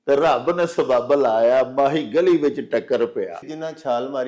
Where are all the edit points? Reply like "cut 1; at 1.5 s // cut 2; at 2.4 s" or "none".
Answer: cut 1; at 3.4 s